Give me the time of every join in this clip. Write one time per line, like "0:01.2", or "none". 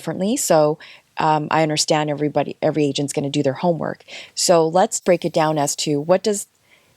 0:05.0